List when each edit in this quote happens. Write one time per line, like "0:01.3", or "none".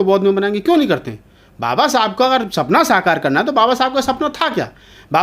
none

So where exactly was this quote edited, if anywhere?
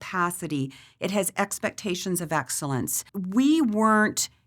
0:03.0

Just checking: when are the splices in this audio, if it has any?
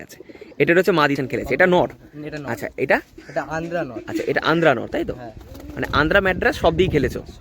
0:01.2

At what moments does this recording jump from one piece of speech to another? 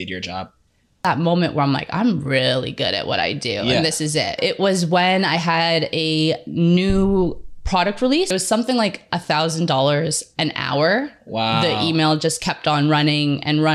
0:01.1
0:04.4
0:08.3

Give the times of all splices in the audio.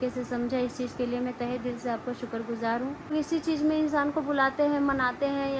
0:03.1

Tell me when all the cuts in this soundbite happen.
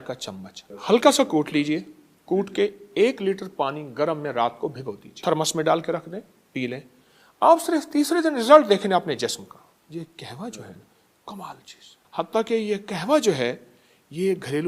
0:05.1
0:09.8
0:12.0

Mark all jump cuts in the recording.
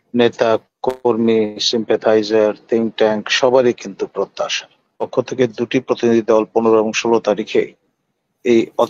0:05.1

